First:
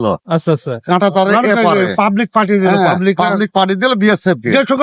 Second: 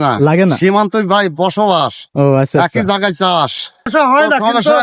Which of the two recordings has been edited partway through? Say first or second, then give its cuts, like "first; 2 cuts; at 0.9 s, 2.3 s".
second; 1 cut; at 3.9 s